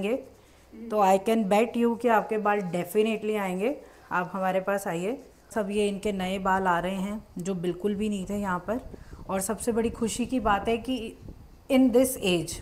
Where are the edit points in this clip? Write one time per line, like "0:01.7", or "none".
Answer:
0:05.5